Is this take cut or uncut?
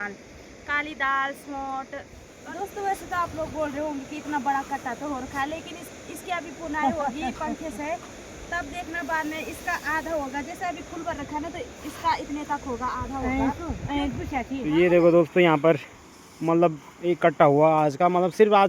cut